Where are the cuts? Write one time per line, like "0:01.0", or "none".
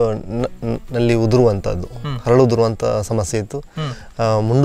none